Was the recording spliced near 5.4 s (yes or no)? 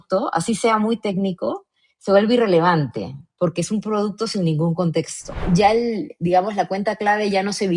yes